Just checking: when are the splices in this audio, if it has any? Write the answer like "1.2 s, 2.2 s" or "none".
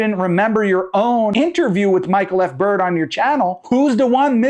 1.3 s